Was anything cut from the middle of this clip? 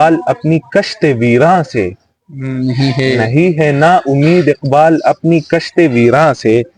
no; 0 cuts

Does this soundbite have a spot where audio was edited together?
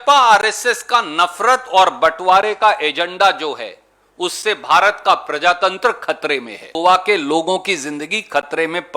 yes; 1 cut; at 6.7 s

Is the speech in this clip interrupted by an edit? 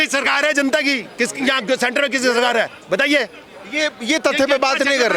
no; 0 cuts

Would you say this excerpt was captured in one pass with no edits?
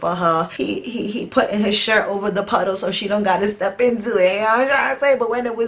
yes; 0 cuts

